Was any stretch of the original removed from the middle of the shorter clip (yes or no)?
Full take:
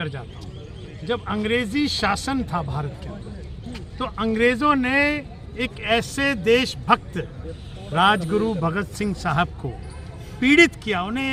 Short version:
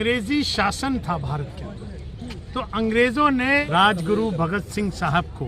yes